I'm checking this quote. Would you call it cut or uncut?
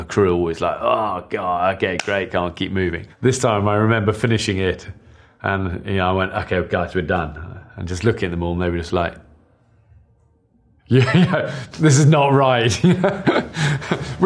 cut